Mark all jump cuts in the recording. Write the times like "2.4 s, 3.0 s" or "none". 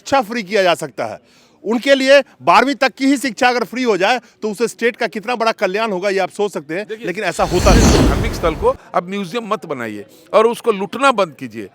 8.0 s